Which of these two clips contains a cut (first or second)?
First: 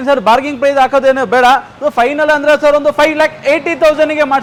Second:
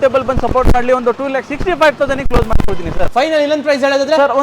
second